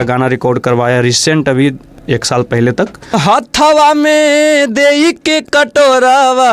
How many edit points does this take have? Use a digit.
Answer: 1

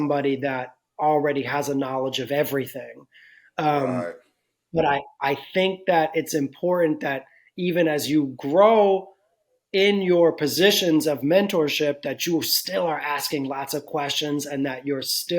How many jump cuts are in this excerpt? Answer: 0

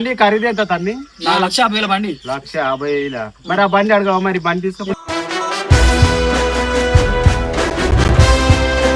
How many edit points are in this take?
0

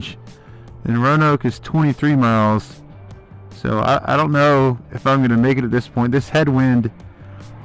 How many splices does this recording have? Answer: 0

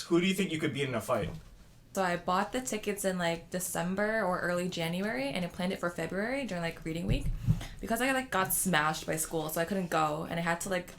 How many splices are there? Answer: 1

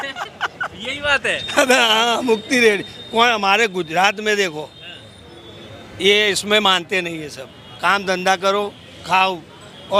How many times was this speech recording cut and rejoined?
0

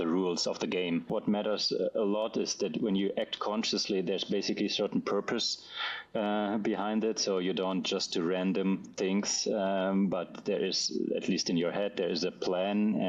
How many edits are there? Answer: 1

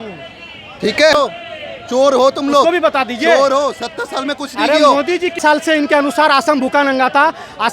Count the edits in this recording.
2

